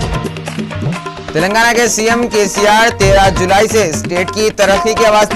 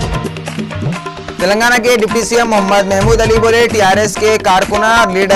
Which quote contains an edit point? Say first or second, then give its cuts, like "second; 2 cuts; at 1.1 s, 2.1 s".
first; 1 cut; at 1.1 s